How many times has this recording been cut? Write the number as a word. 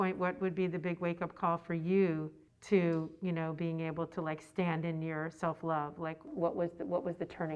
one